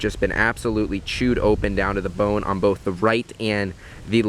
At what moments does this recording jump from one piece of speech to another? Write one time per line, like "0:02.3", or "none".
none